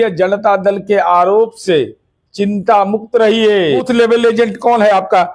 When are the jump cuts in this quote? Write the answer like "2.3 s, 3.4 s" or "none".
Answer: 3.9 s